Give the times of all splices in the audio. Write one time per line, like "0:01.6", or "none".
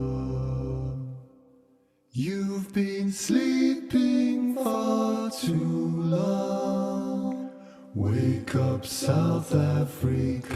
0:09.2